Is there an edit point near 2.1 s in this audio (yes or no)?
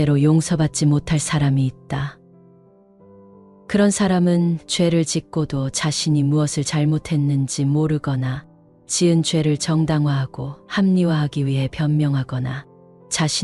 no